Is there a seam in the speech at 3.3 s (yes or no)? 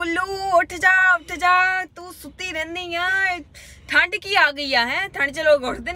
no